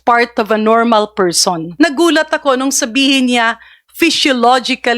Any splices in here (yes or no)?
yes